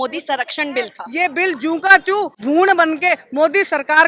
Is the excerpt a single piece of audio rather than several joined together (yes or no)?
no